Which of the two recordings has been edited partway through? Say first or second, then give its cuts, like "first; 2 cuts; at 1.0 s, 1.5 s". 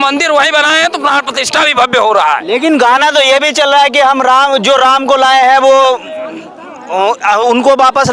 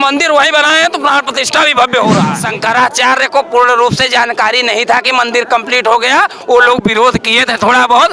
second; 1 cut; at 2.3 s